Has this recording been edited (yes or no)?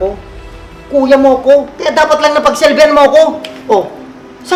no